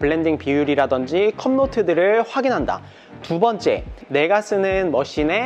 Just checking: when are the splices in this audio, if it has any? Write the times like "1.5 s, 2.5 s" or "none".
none

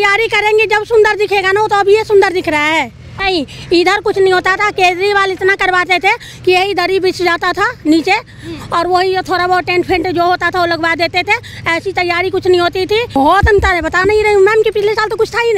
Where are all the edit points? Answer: 3.1 s, 13.2 s

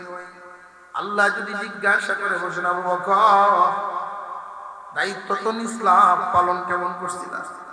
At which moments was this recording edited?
none

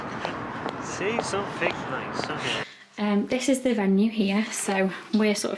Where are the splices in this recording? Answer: 2.6 s

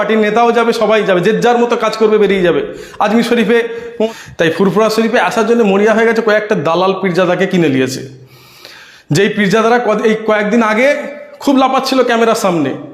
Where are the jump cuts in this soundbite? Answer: 4.1 s

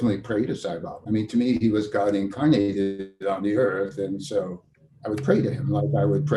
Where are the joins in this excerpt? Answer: 0.9 s

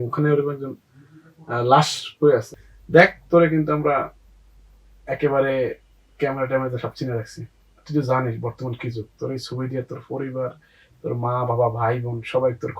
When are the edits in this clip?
2.5 s

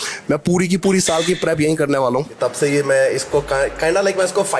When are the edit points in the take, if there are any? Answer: 2.3 s

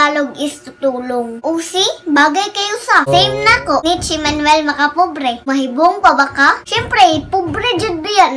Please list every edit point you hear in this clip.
3.1 s, 3.8 s, 5.5 s

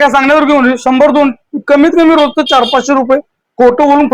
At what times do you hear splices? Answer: none

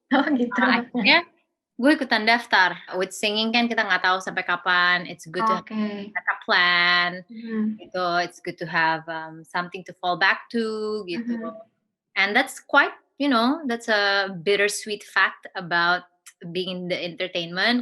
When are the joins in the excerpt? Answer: 2.9 s

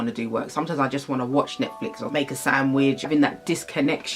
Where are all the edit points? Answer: 2.1 s, 3.1 s

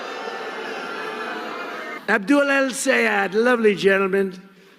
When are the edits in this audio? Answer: 1.9 s

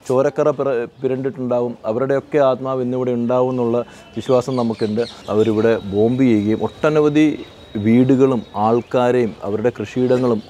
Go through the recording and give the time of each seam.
5.2 s

